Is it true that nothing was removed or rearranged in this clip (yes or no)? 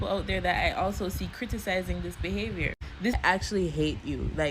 no